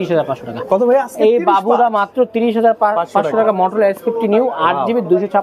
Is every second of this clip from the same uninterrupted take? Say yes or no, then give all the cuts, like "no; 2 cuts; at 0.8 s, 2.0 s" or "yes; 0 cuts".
yes; 0 cuts